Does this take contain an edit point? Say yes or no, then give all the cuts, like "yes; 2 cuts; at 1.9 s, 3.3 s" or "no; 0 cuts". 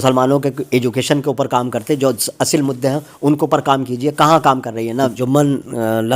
yes; 1 cut; at 5.2 s